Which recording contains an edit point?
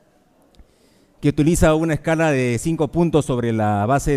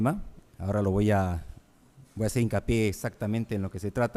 first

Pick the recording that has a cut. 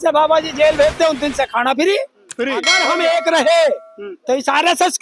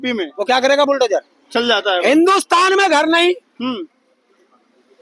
first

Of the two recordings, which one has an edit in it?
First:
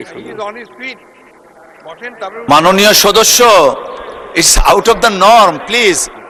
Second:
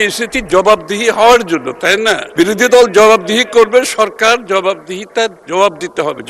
second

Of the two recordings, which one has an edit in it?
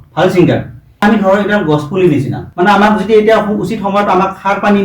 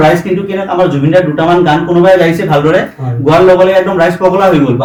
first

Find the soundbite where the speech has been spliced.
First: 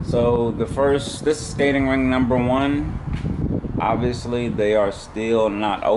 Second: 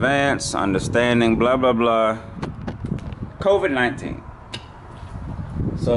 second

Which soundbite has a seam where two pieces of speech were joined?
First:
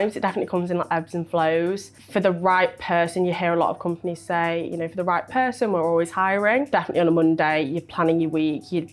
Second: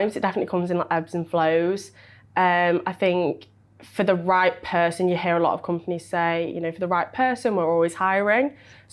first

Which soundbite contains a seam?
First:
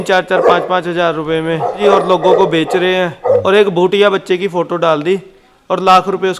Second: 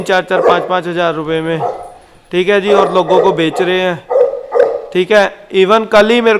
first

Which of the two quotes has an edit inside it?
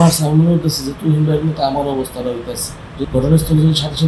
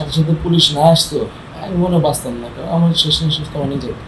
first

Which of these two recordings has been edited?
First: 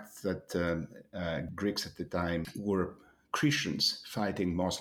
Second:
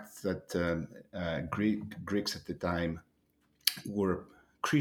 first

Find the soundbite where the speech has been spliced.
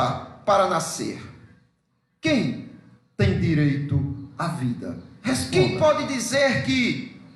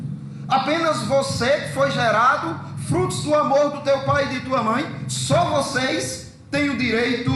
first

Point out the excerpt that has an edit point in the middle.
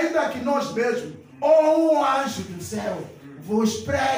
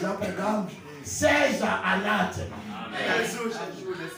second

